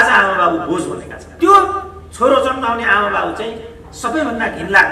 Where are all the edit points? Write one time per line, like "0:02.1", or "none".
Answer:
0:01.3